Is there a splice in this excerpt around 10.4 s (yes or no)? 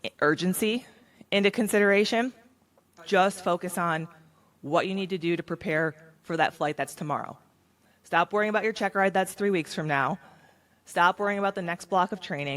no